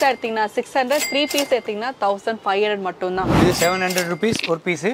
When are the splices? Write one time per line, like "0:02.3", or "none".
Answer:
0:03.3